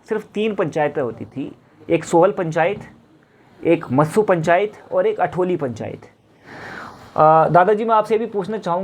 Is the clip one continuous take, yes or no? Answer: yes